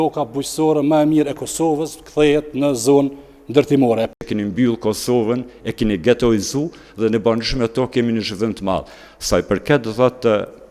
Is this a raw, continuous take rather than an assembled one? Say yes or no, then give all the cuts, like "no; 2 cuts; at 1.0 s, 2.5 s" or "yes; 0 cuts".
no; 1 cut; at 4.1 s